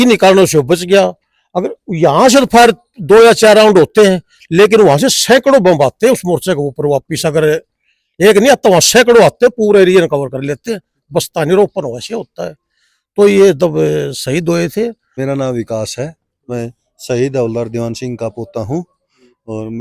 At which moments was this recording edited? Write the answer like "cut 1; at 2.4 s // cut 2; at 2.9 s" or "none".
cut 1; at 15.1 s